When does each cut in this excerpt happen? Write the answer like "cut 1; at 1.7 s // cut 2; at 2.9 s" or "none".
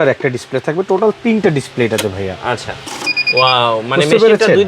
cut 1; at 2.8 s